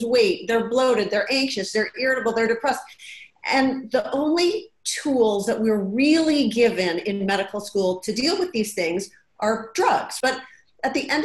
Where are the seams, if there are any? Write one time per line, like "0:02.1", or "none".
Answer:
0:10.2

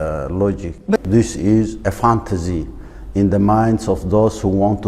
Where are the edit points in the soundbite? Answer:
0:01.0

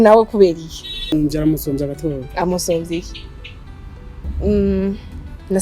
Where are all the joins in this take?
0:01.1
0:04.3

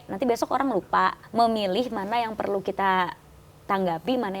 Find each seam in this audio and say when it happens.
0:01.2

